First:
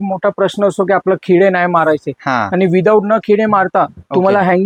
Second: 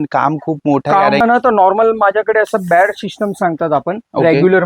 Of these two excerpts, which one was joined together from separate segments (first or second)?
second